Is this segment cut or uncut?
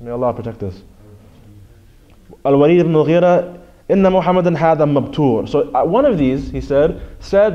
uncut